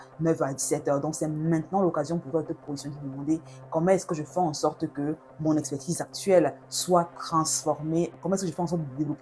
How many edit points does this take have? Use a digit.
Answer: 1